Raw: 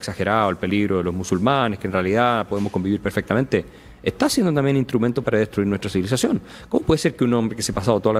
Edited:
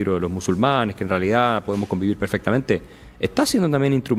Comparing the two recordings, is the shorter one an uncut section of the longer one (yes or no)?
yes